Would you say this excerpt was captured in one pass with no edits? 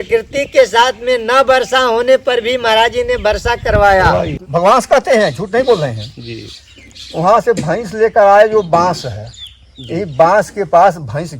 no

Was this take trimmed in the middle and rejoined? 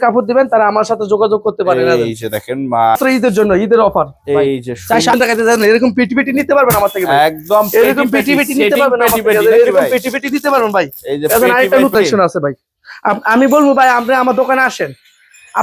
yes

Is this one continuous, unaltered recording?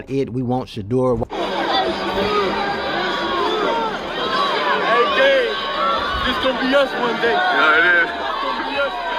no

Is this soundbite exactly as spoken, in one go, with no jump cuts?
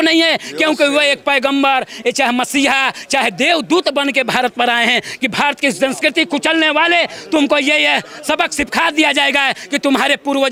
yes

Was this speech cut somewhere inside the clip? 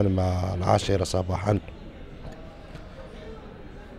no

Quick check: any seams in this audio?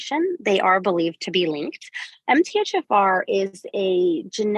no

